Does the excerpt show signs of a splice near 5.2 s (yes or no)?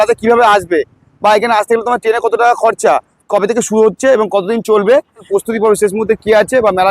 yes